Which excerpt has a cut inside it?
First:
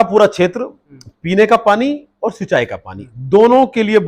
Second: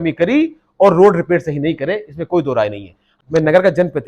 second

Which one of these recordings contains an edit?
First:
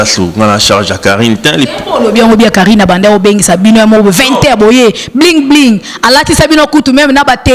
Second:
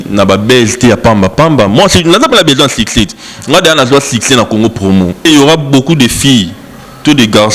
second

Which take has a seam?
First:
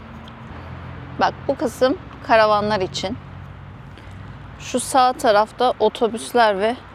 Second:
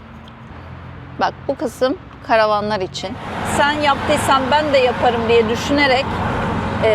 second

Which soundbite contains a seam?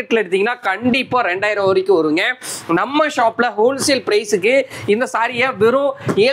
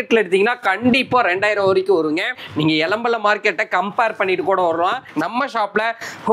second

